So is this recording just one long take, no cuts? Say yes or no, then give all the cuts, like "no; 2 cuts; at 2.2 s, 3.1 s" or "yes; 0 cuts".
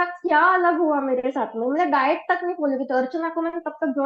yes; 0 cuts